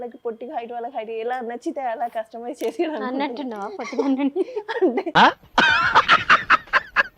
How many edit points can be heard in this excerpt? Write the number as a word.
zero